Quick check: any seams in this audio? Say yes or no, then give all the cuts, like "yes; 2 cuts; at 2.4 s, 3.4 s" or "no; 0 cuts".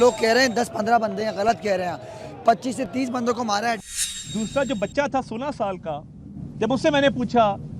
yes; 1 cut; at 3.8 s